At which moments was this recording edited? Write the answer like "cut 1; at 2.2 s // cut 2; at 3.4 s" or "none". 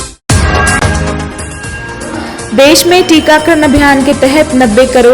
none

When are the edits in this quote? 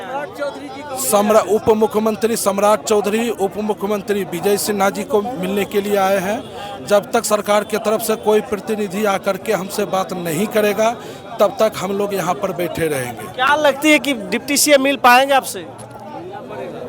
none

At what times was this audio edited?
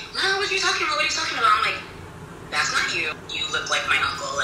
cut 1; at 3.1 s

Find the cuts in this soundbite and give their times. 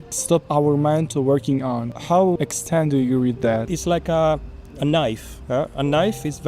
cut 1; at 2.4 s // cut 2; at 3.7 s

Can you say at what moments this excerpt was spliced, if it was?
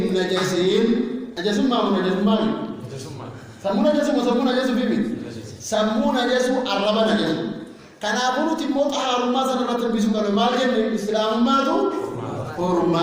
cut 1; at 1.3 s

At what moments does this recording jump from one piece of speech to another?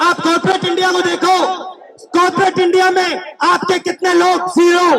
none

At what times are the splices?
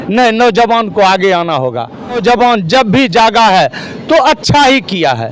cut 1; at 2.2 s

